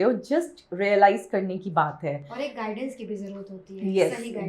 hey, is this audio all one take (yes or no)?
yes